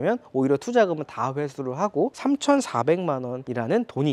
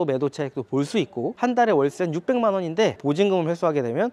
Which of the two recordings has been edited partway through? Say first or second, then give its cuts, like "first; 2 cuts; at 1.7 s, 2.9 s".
second; 1 cut; at 3.0 s